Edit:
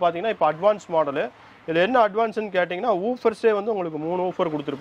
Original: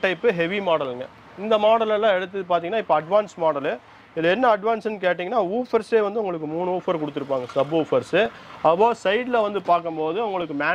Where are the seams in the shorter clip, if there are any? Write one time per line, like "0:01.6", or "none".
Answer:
none